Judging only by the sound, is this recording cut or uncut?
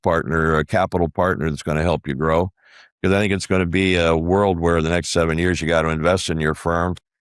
uncut